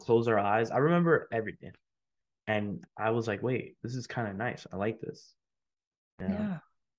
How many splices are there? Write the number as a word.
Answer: two